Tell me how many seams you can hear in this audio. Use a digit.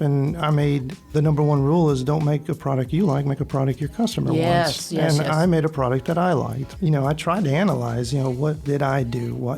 3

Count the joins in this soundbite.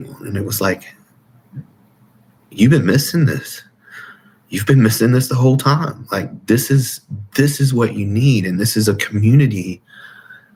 0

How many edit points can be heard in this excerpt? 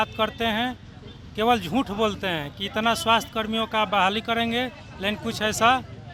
0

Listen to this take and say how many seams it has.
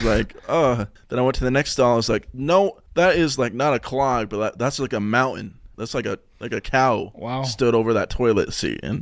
2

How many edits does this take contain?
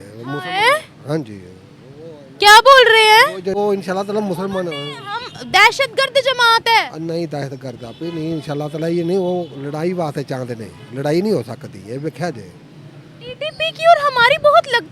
1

